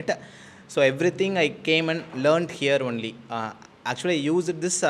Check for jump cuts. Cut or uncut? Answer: uncut